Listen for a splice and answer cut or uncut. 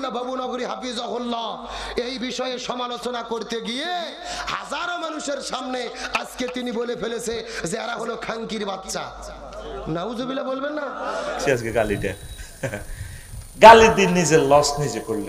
cut